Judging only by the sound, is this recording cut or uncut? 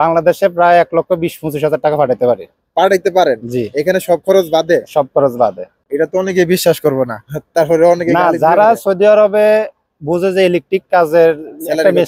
uncut